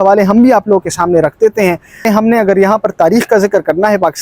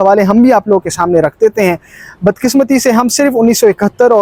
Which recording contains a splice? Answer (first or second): first